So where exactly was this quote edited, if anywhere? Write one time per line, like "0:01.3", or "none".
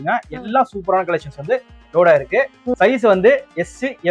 0:02.6